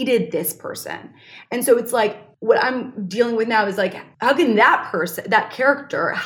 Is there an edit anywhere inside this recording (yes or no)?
yes